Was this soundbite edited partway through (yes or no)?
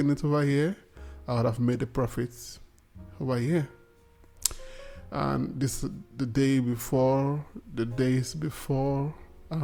no